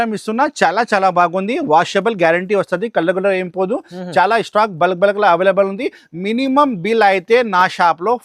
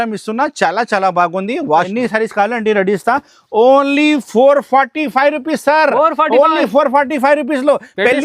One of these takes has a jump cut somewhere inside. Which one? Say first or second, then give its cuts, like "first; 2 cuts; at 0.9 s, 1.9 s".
second; 1 cut; at 1.9 s